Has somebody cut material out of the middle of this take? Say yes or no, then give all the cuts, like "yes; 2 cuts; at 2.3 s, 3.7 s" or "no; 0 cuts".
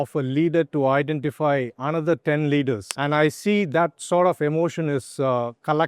yes; 1 cut; at 2.9 s